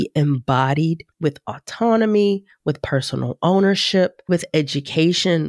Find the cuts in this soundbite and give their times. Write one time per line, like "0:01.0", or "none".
0:01.1
0:04.3